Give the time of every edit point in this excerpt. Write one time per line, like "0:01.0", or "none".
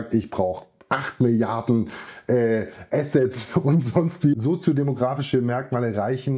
0:04.3